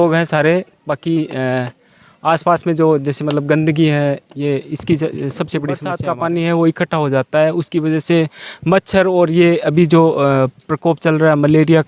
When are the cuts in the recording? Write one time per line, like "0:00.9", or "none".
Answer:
0:06.0